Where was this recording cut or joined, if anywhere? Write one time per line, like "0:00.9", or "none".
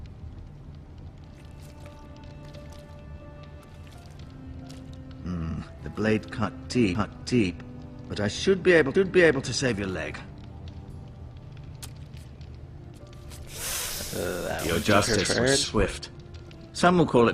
0:11.9